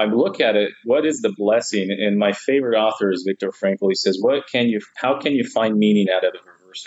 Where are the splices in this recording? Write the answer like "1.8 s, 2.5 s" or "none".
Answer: none